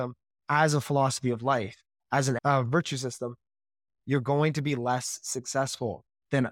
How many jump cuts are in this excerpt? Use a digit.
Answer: 1